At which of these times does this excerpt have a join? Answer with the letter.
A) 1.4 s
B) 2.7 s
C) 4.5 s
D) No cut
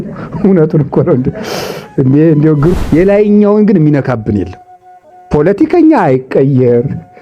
B